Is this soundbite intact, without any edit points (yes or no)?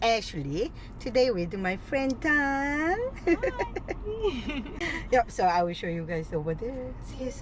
no